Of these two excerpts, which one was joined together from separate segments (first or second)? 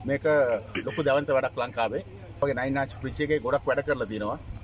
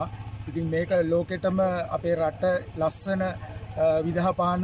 first